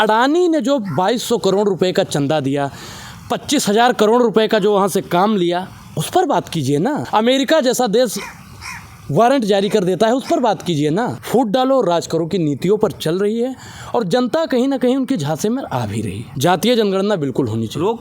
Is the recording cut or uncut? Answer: cut